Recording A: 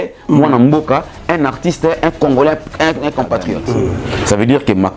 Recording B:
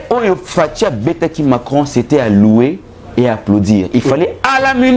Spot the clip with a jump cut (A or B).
A